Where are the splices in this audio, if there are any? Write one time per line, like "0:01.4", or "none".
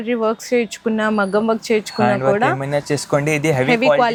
none